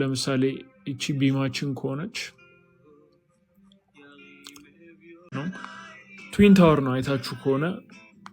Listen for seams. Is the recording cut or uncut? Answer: cut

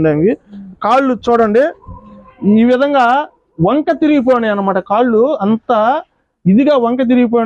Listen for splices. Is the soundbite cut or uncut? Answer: uncut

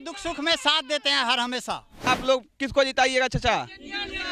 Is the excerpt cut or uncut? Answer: cut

